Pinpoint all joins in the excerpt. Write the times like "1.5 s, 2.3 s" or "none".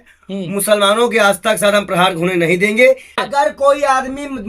3.2 s

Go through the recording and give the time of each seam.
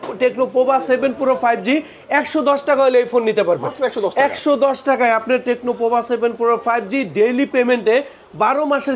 none

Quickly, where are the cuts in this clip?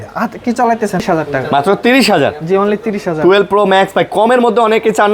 1.0 s

